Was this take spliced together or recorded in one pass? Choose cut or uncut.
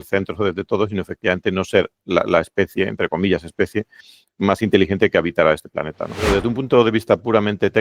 cut